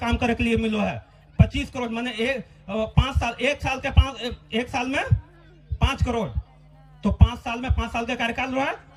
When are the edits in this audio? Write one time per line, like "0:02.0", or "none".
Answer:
none